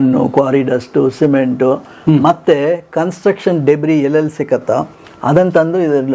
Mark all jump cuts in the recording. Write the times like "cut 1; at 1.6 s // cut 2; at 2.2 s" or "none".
none